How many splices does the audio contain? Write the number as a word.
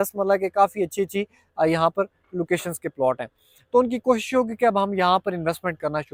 zero